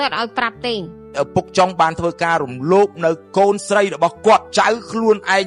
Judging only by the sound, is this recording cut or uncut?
cut